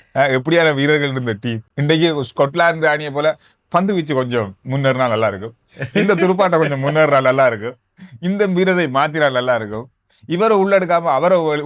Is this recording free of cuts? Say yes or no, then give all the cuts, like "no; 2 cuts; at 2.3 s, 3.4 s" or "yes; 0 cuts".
no; 1 cut; at 1.7 s